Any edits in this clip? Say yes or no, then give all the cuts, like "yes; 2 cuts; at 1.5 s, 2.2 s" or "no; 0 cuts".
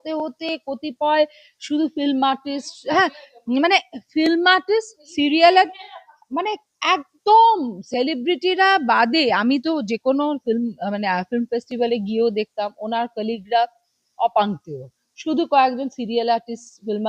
no; 0 cuts